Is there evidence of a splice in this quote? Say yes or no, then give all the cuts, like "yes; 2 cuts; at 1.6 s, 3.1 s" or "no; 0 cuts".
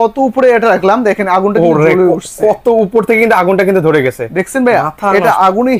no; 0 cuts